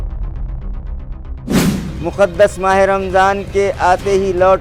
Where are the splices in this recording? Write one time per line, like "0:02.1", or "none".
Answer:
0:01.6

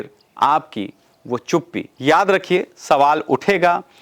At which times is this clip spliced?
0:01.8

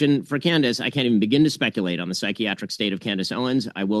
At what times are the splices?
none

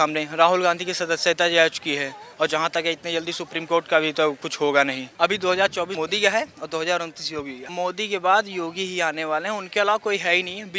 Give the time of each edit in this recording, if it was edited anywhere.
0:05.0
0:07.6

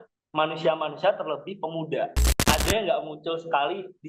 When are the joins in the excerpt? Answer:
0:02.3

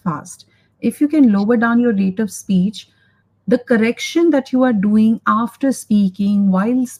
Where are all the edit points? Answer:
none

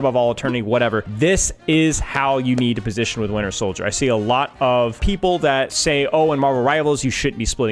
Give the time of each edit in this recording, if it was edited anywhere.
0:01.1
0:05.3

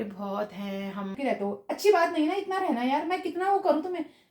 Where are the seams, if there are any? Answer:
0:01.2

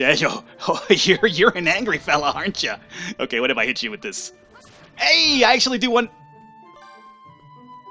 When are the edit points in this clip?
none

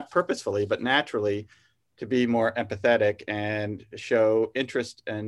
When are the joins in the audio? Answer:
none

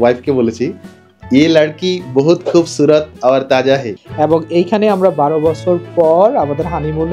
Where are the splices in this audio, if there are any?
0:04.0

